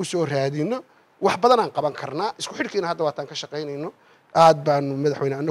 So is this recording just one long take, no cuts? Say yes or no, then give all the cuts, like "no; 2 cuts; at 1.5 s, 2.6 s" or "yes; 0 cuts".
yes; 0 cuts